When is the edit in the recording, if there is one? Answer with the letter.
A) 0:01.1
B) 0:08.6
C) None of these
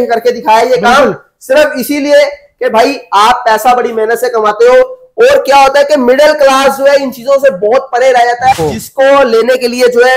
B